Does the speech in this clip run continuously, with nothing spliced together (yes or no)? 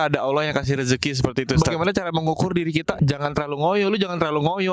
no